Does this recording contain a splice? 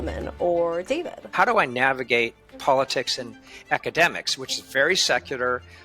yes; 1 cut; at 1.3 s

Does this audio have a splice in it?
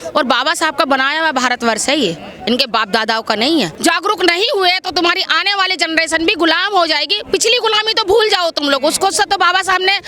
yes; 1 cut; at 3.7 s

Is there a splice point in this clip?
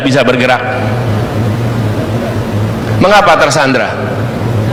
no; 0 cuts

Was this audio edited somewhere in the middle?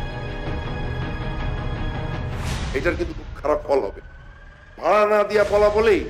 no; 0 cuts

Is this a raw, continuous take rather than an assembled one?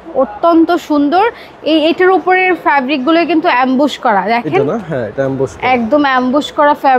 yes; 0 cuts

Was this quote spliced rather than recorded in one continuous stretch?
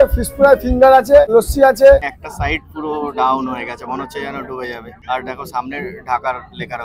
yes; 3 cuts; at 1.3 s, 2.2 s, 4.9 s

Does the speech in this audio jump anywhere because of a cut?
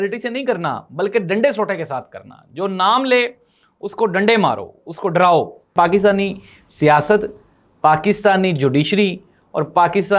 yes; 1 cut; at 5.7 s

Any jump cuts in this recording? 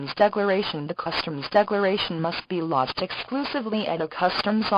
yes; 2 cuts; at 1.0 s, 2.0 s

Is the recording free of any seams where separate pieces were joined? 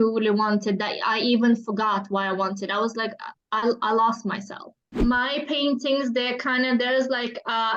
no; 1 cut; at 5.0 s

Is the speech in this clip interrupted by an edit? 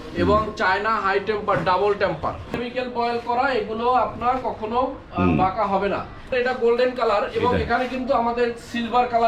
yes; 2 cuts; at 2.6 s, 6.3 s

